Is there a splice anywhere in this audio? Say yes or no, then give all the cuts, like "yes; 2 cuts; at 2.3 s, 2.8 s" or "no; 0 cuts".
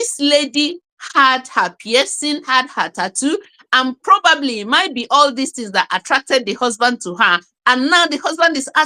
yes; 1 cut; at 2.5 s